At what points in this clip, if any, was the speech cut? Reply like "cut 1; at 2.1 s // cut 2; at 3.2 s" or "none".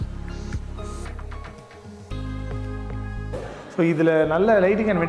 none

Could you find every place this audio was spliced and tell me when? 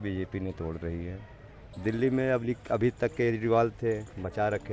cut 1; at 1.7 s

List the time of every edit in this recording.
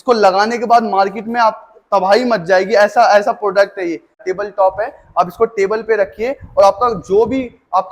cut 1; at 4.2 s

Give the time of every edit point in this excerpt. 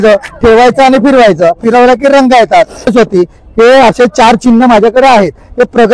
cut 1; at 2.9 s

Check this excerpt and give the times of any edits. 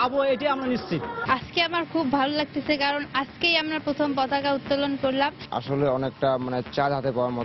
cut 1; at 1.1 s // cut 2; at 5.5 s

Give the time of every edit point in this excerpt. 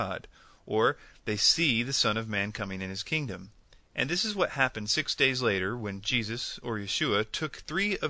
cut 1; at 2.3 s

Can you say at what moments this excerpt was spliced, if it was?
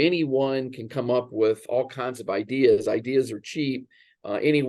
none

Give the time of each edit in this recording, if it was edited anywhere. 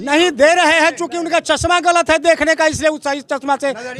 none

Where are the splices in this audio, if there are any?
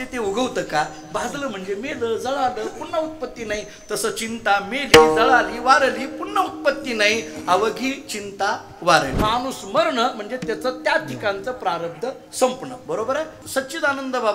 cut 1; at 9.1 s // cut 2; at 13.4 s

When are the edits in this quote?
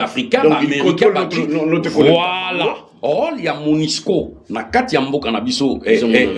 cut 1; at 2.9 s

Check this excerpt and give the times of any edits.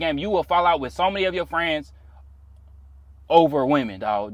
none

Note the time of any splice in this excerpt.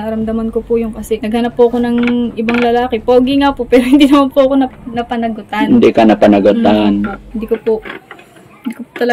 cut 1; at 1.2 s // cut 2; at 7.2 s

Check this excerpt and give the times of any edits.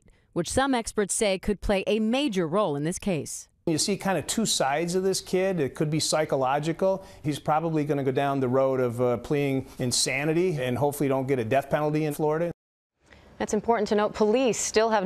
none

